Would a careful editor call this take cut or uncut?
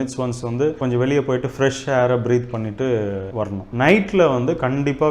cut